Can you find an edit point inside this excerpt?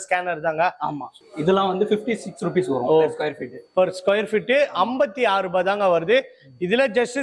yes; 1 cut; at 1.1 s

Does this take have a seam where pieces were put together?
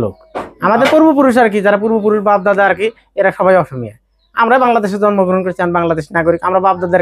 no; 0 cuts

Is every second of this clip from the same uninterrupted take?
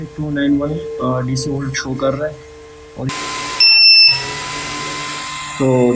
no; 1 cut; at 3.1 s

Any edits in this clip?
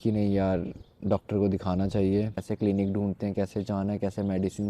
yes; 1 cut; at 2.5 s

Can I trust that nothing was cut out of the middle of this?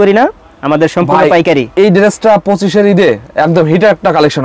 yes; 0 cuts

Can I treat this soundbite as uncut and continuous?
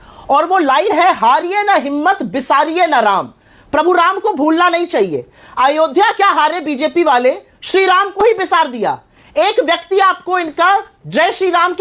yes; 0 cuts

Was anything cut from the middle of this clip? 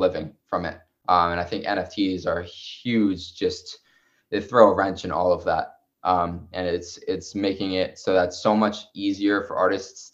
no; 0 cuts

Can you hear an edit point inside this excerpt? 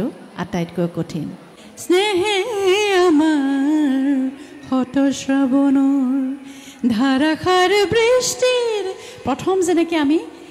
yes; 1 cut; at 1.7 s

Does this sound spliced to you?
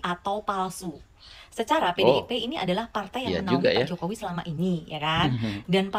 no; 0 cuts

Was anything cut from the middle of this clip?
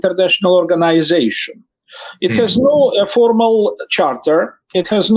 no; 0 cuts

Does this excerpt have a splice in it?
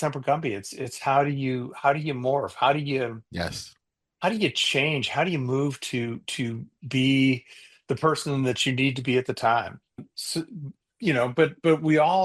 yes; 1 cut; at 10.1 s

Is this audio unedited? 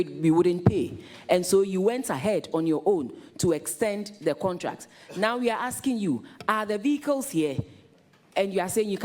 yes; 0 cuts

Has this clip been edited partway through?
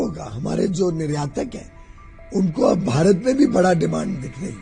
no; 0 cuts

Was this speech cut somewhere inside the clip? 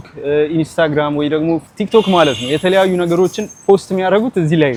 no; 0 cuts

